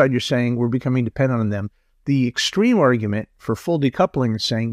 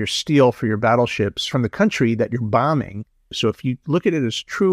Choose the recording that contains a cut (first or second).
second